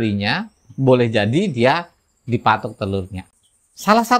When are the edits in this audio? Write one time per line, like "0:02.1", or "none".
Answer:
0:03.2